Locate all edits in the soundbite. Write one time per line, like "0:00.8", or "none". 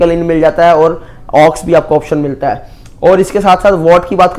none